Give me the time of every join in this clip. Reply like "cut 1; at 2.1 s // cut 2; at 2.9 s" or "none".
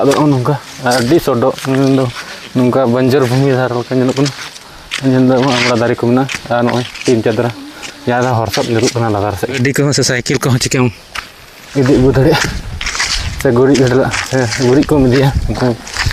cut 1; at 9.6 s